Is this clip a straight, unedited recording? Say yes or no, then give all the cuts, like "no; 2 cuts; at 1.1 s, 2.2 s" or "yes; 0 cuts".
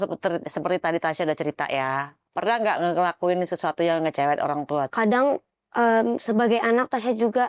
no; 1 cut; at 4.9 s